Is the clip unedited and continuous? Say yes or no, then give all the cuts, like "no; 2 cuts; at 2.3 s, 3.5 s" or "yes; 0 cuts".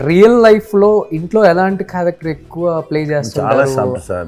yes; 0 cuts